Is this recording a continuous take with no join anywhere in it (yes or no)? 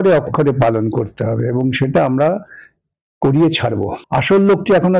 no